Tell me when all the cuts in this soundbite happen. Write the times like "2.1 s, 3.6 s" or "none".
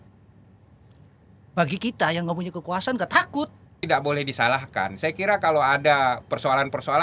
3.8 s